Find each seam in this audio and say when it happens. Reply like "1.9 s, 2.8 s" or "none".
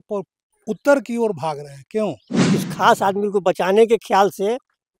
2.3 s